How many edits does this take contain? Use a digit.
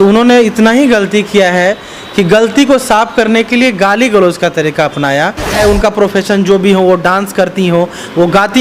1